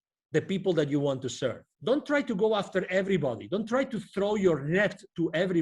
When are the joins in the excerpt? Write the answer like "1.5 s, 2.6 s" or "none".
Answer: 1.7 s